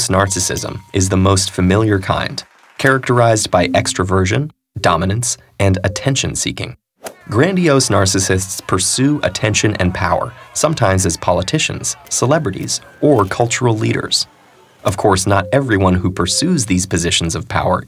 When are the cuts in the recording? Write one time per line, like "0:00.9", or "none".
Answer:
0:16.6